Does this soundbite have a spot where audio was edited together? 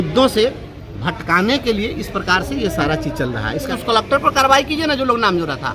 yes; 1 cut; at 3.7 s

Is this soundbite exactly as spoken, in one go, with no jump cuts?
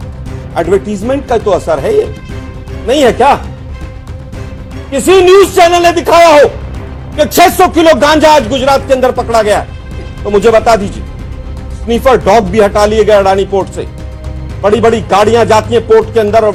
yes; 0 cuts

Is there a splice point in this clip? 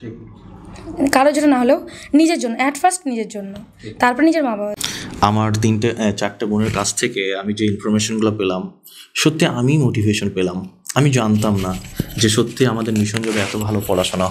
yes; 1 cut; at 4.7 s

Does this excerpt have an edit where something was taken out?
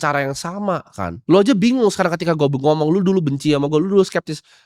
no; 0 cuts

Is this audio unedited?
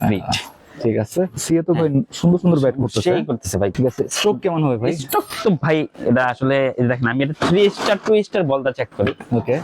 no; 2 cuts; at 1.4 s, 3.7 s

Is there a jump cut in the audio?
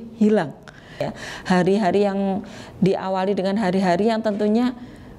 yes; 1 cut; at 1.1 s

